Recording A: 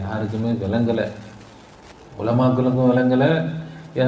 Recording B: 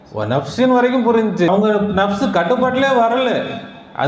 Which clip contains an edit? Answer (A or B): B